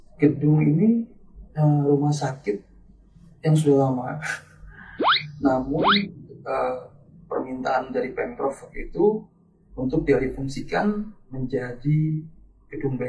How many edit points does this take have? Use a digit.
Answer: 0